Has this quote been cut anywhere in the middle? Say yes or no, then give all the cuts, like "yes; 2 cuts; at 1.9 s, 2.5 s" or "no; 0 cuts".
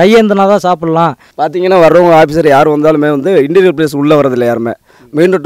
yes; 1 cut; at 1.2 s